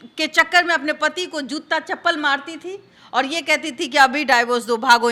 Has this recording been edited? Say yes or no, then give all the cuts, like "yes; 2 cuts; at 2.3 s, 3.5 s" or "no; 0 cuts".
no; 0 cuts